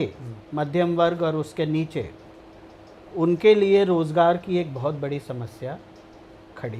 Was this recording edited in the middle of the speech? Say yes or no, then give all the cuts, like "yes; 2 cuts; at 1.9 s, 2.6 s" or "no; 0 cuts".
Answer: no; 0 cuts